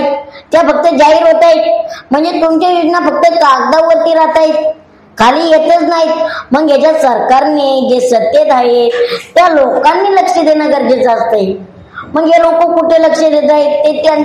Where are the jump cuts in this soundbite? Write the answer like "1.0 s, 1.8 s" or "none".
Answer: none